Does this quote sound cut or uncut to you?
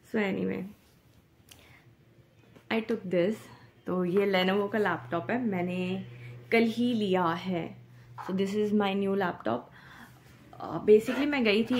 uncut